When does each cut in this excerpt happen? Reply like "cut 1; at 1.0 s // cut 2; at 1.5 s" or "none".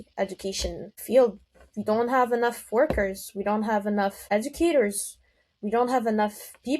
cut 1; at 1.0 s // cut 2; at 4.2 s